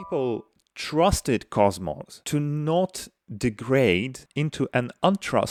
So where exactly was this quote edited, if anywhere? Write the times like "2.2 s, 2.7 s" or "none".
none